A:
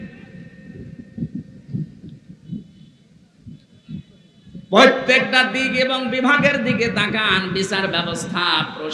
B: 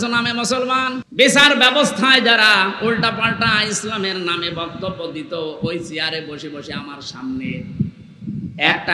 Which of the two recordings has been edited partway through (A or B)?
B